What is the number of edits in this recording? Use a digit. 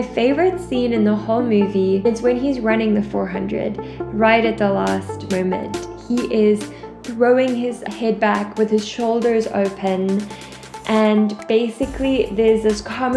1